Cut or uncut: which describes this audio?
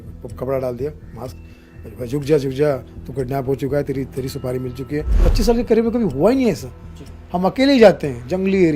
cut